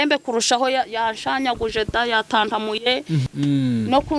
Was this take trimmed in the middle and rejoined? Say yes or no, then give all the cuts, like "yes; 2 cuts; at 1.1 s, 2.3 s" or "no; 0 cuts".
yes; 1 cut; at 3.2 s